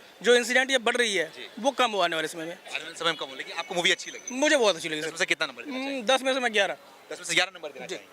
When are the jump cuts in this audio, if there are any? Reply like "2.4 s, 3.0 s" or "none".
none